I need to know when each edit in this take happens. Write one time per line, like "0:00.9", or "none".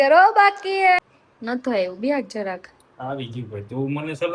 0:01.0